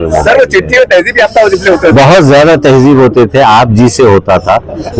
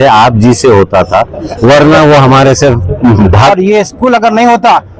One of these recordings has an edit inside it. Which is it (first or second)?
second